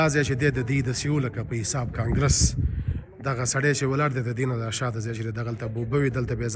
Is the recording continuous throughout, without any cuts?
yes; 0 cuts

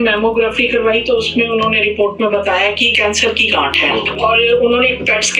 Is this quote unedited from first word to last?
no; 1 cut; at 2.9 s

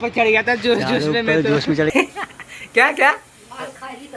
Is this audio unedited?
no; 1 cut; at 1.9 s

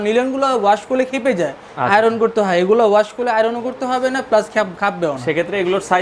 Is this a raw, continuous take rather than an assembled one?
yes; 0 cuts

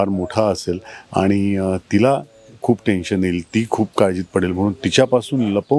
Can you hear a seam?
no; 0 cuts

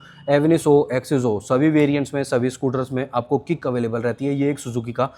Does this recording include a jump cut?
no; 0 cuts

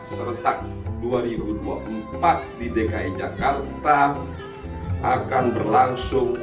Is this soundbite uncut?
yes; 0 cuts

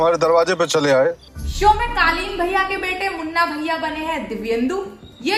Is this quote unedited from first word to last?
yes; 0 cuts

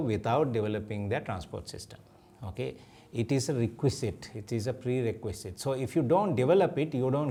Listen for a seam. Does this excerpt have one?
no; 0 cuts

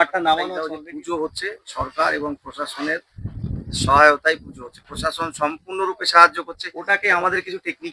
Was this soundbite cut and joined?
yes; 2 cuts; at 0.8 s, 7.0 s

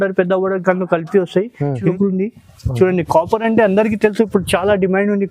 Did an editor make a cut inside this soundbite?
yes; 1 cut; at 1.9 s

